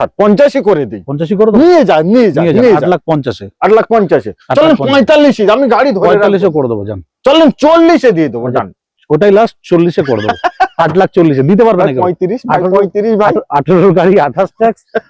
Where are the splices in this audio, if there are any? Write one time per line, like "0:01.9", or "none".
none